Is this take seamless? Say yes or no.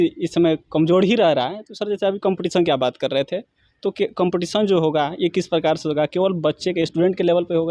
yes